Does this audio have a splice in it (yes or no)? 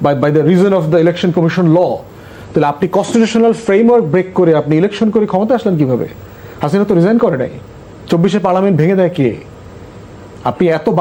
no